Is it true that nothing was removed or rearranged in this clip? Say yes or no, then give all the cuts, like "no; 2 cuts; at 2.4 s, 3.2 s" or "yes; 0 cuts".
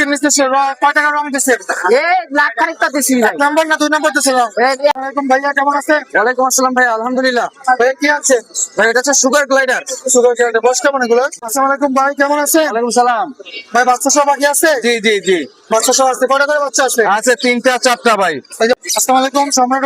no; 3 cuts; at 5.0 s, 11.3 s, 18.8 s